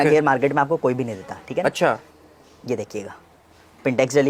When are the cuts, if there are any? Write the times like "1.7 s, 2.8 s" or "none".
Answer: none